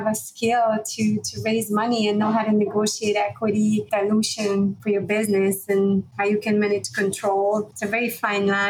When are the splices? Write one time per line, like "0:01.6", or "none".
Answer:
0:03.9
0:04.8
0:06.1
0:07.8

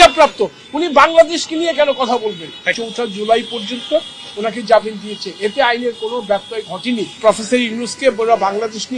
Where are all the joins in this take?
0:02.7
0:07.2

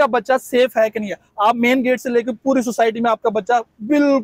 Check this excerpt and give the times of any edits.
none

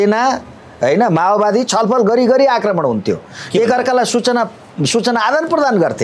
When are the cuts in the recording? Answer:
none

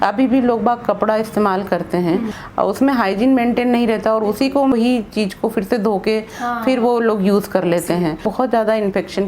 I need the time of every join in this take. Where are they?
0:02.4
0:04.7
0:08.3

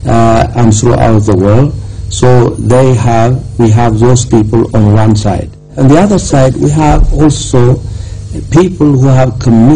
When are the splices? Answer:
none

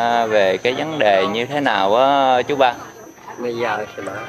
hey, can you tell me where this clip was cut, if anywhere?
none

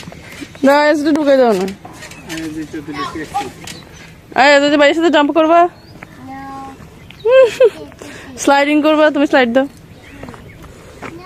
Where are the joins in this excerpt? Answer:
none

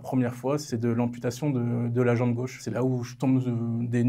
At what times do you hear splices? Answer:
0:02.6

